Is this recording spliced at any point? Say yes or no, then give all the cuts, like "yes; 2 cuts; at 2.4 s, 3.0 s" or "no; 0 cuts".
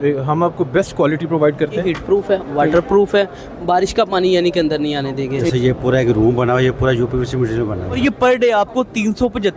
yes; 3 cuts; at 1.8 s, 5.5 s, 8.0 s